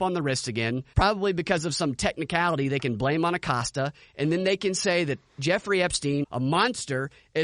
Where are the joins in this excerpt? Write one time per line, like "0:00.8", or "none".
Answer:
0:00.9
0:06.3